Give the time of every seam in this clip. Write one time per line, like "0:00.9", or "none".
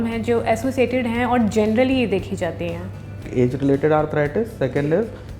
0:03.2